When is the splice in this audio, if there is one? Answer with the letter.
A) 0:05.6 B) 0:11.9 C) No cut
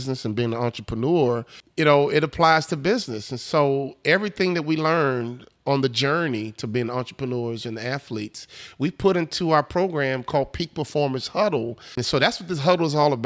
B